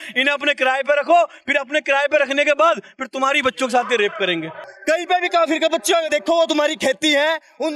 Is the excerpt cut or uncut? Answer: cut